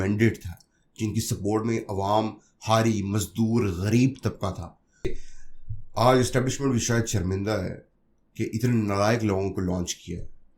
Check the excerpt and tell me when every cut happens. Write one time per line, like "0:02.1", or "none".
0:05.2